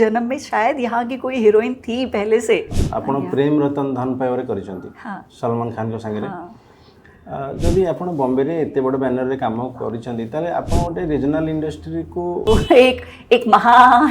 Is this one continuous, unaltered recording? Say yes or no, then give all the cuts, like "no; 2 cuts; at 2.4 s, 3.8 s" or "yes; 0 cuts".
no; 2 cuts; at 2.8 s, 12.4 s